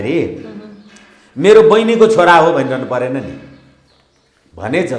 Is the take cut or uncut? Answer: uncut